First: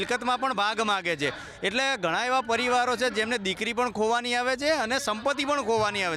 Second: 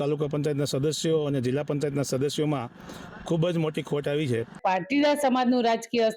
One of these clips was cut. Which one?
second; 1 cut; at 4.6 s

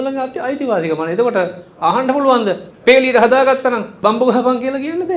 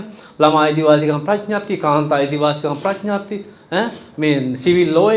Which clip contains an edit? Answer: first; 2 cuts; at 2.7 s, 3.9 s

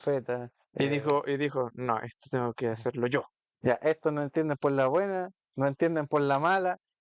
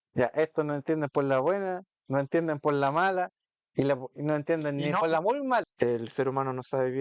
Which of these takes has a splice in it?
second; 1 cut; at 5.7 s

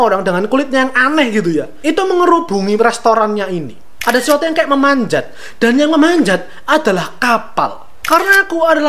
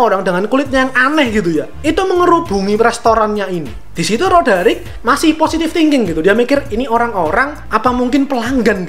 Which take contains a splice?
first; 2 cuts; at 3.8 s, 7.9 s

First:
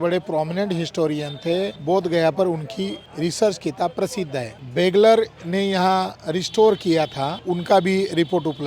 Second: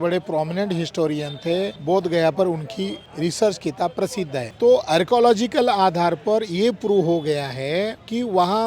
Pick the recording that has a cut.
second; 1 cut; at 4.4 s

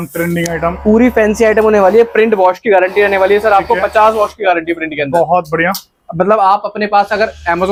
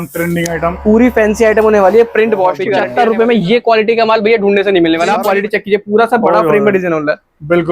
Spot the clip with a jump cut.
second; 2 cuts; at 2.8 s, 5.2 s

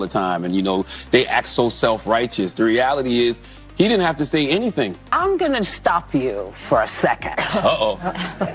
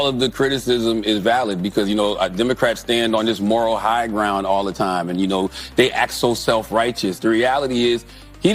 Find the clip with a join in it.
first; 1 cut; at 5.0 s

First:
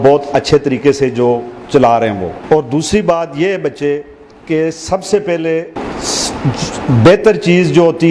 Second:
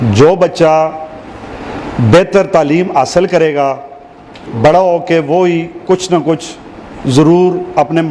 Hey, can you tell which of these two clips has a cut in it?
first; 2 cuts; at 2.4 s, 5.7 s

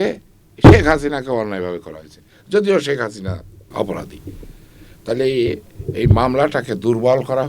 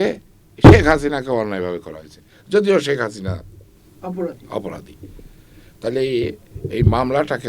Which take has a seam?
first; 1 cut; at 3.7 s

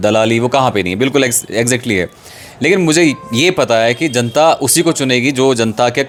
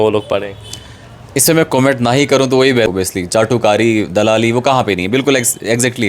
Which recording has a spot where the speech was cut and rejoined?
second; 1 cut; at 2.9 s

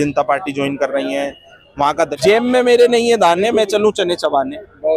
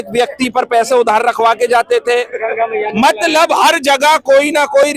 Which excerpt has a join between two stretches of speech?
first; 1 cut; at 2.1 s

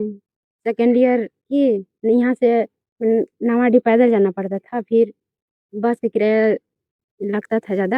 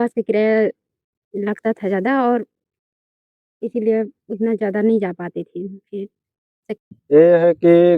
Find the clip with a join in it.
second; 1 cut; at 6.6 s

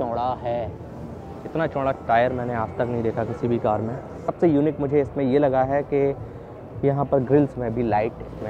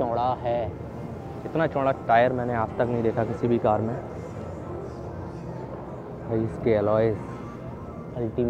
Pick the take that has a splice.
first; 1 cut; at 4.3 s

